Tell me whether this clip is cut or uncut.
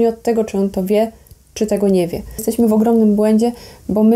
cut